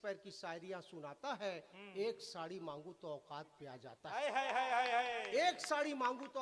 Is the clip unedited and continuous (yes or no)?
yes